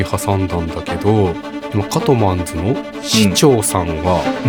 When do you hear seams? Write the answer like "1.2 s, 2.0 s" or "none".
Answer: none